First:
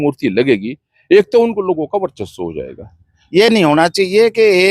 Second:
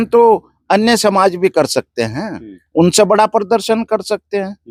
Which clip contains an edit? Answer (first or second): first